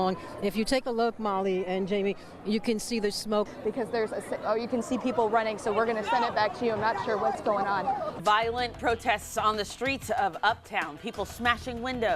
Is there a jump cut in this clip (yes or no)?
yes